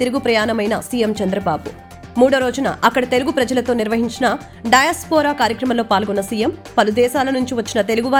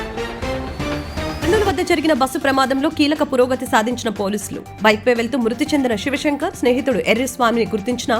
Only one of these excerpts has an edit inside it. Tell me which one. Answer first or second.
second